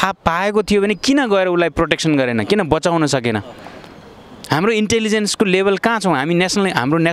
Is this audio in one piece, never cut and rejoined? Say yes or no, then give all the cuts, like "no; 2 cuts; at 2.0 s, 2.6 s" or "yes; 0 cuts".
yes; 0 cuts